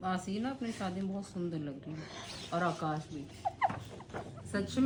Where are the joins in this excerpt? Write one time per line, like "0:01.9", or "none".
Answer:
none